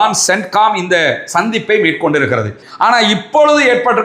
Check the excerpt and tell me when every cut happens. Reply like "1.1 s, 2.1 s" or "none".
2.6 s